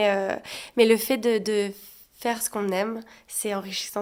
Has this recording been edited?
no; 0 cuts

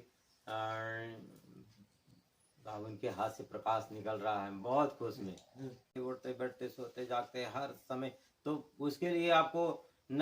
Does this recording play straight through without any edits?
no; 1 cut; at 5.9 s

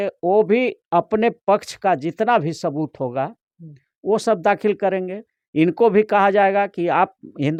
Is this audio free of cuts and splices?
yes; 0 cuts

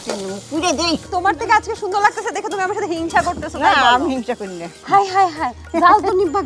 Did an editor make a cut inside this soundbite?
yes; 2 cuts; at 1.1 s, 4.7 s

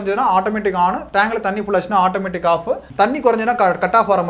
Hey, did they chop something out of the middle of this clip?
yes; 1 cut; at 2.9 s

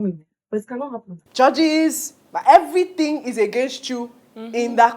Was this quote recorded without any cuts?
no; 1 cut; at 1.2 s

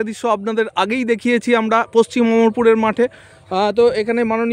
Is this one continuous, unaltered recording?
yes; 0 cuts

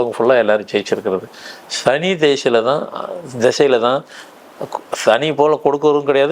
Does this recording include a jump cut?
no; 0 cuts

